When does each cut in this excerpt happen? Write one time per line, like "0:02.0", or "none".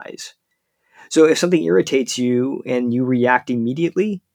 none

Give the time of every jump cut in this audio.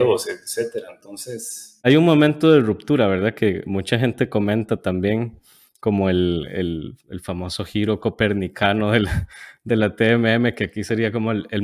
0:01.8

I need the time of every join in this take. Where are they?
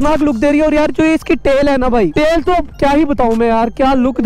0:02.1

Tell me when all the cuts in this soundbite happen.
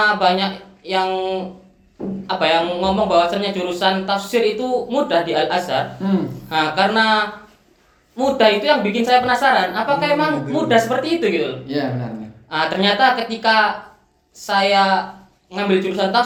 none

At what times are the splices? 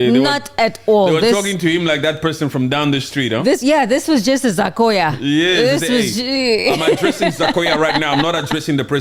none

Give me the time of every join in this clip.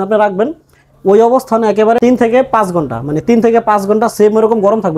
0:02.0

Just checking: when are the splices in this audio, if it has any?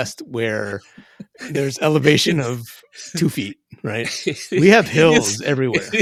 none

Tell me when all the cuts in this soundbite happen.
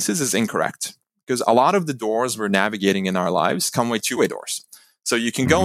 0:04.1

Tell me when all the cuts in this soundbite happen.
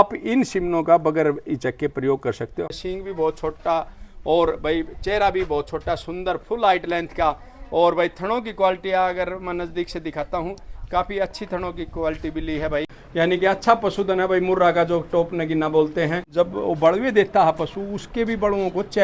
0:02.7
0:13.0
0:16.2

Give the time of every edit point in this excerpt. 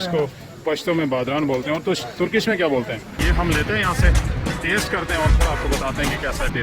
0:03.0

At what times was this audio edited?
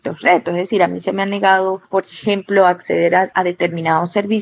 0:03.3

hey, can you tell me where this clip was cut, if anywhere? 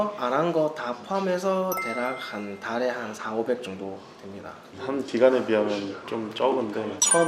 0:04.8

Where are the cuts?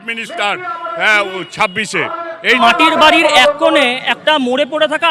0:02.6

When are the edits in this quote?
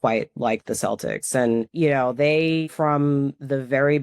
0:01.7
0:02.7

